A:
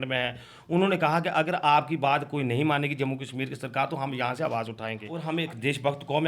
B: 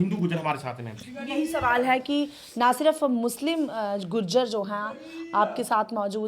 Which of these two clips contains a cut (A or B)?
A